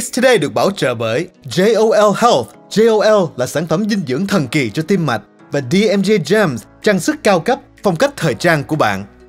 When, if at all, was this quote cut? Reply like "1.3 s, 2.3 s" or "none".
none